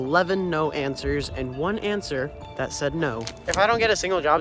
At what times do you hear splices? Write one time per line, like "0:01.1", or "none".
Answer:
0:03.3